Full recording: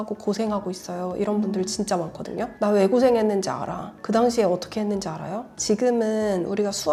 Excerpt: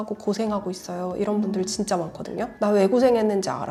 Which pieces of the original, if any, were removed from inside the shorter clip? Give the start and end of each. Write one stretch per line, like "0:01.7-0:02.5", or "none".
none